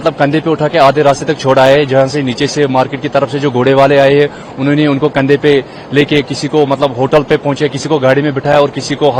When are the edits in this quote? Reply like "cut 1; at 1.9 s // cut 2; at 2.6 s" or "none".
none